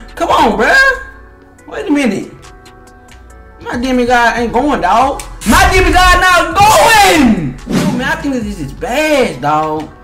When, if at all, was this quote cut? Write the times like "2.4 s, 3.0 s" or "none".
8.0 s